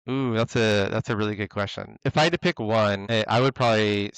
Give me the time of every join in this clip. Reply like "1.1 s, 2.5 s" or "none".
2.0 s, 3.0 s

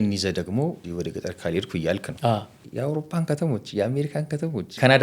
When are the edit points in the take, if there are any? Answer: 0.8 s, 2.5 s

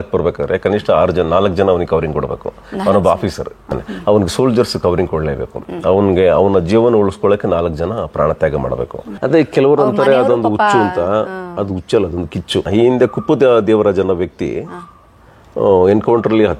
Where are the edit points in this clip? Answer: 3.7 s, 9.2 s, 12.7 s

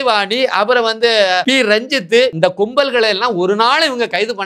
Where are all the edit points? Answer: 1.4 s, 2.3 s

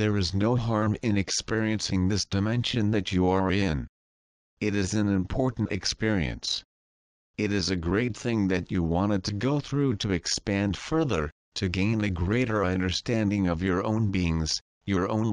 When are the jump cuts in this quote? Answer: 1.1 s

